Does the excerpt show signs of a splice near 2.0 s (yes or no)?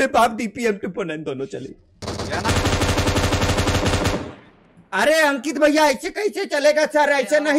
yes